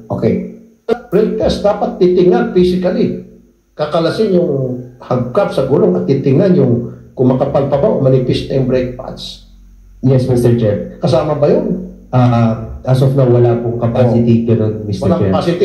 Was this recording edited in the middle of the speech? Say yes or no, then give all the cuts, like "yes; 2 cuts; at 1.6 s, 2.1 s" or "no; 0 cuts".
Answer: yes; 1 cut; at 0.9 s